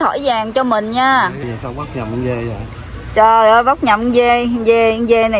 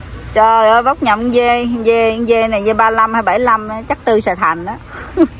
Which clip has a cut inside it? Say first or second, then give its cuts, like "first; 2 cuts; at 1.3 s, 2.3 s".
first; 1 cut; at 1.4 s